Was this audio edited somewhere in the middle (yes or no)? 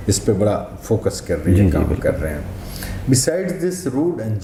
no